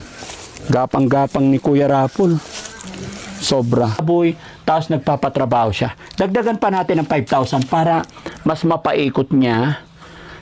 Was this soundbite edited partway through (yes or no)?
yes